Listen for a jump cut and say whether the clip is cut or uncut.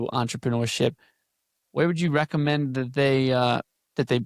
uncut